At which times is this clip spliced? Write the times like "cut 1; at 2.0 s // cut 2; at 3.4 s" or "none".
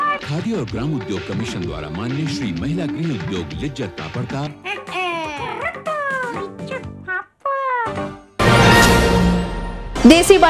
cut 1; at 8.3 s